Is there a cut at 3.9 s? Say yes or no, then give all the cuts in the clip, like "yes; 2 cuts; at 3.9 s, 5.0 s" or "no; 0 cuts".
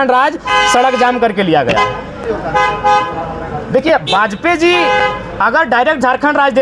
no; 1 cut; at 2.2 s